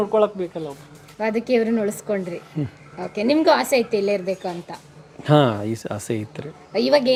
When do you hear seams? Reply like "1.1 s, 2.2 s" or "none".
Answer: none